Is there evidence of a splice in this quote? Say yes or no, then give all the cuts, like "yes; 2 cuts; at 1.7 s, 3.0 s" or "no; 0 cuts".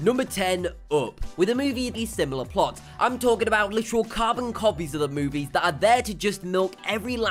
no; 0 cuts